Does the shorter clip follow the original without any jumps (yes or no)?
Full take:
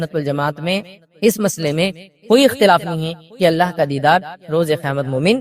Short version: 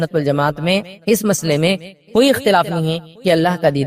no